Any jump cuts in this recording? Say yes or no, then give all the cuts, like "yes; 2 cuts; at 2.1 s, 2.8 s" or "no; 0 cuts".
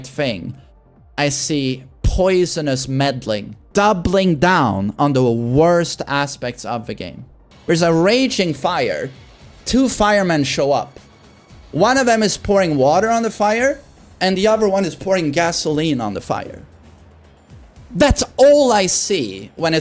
yes; 3 cuts; at 3.6 s, 7.5 s, 8.6 s